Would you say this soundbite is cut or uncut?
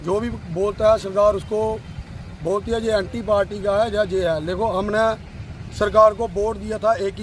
uncut